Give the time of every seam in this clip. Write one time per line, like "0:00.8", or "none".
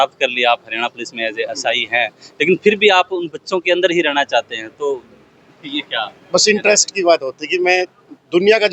none